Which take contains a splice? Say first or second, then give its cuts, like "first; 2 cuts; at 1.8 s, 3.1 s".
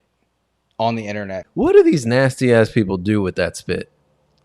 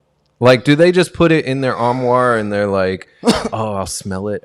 first; 1 cut; at 1.4 s